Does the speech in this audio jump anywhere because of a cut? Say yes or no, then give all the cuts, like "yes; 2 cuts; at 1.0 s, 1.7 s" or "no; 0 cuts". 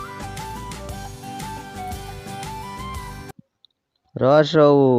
yes; 2 cuts; at 1.2 s, 3.2 s